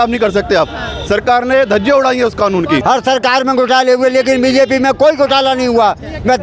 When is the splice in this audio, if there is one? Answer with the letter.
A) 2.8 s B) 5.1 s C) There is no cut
A